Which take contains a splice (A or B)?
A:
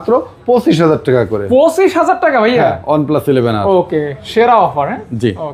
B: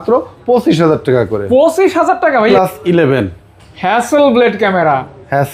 B